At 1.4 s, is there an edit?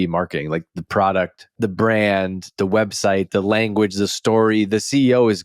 yes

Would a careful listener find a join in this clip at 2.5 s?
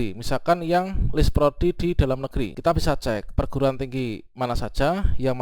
yes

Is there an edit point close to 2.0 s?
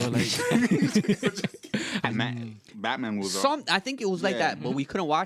yes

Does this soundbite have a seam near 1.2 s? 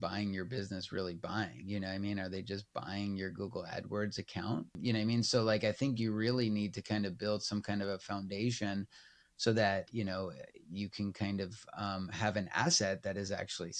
no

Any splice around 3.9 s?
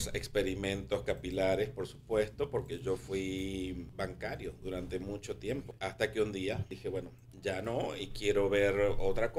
yes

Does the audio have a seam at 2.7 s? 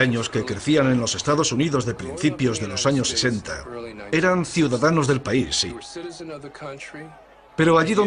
yes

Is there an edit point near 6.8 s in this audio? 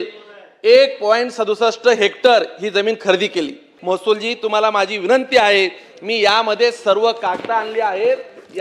no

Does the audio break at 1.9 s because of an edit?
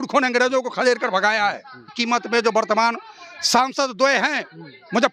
yes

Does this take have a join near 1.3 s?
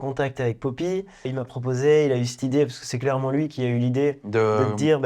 yes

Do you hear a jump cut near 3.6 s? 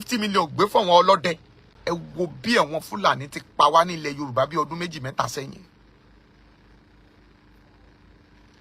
no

